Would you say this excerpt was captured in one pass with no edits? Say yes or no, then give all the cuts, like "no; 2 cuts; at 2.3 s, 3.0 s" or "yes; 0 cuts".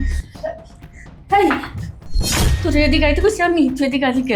yes; 0 cuts